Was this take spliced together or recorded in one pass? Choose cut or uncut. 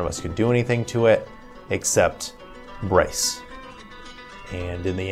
uncut